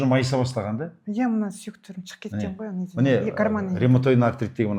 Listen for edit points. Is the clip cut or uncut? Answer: uncut